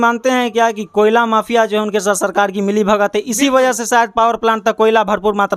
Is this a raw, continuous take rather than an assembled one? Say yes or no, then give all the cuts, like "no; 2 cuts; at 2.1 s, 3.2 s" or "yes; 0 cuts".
yes; 0 cuts